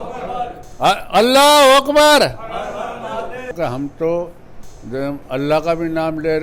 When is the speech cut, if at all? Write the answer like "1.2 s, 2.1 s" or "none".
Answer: 3.5 s